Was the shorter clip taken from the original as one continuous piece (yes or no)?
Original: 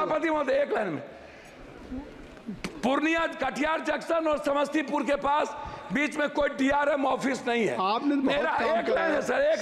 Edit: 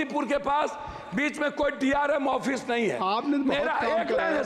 yes